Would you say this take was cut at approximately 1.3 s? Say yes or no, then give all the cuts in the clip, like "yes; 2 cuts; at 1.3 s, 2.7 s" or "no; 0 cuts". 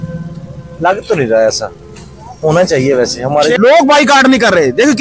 no; 1 cut; at 3.6 s